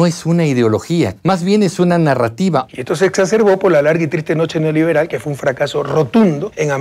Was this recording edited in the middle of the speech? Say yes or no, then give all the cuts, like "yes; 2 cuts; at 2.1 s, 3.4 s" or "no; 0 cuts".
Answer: yes; 2 cuts; at 1.2 s, 2.7 s